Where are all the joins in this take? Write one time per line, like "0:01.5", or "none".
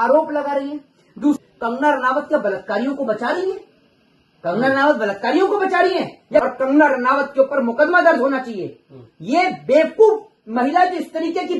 0:01.4
0:06.4